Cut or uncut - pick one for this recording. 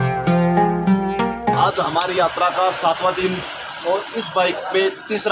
cut